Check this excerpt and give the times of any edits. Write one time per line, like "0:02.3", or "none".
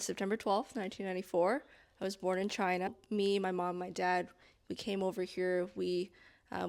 0:02.9

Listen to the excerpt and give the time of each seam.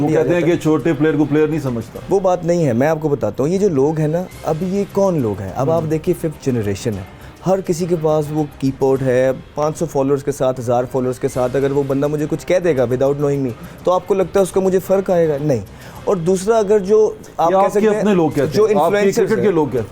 none

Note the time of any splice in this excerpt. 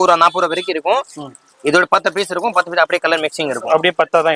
none

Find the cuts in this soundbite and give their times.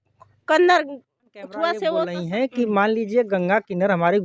0:02.1

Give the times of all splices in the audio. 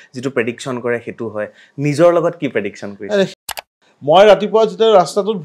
0:03.5

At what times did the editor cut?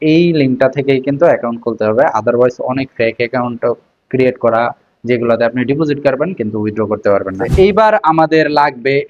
0:07.4

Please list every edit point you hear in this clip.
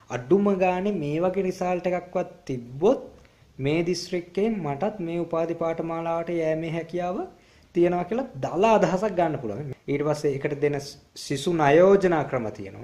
0:09.7

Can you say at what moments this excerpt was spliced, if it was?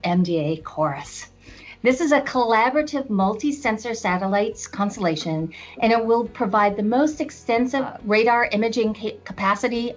none

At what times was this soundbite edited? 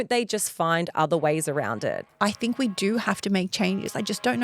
0:02.0

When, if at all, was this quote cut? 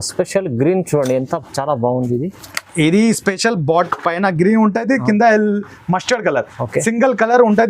none

